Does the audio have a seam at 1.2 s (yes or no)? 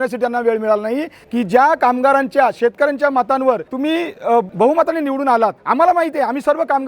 yes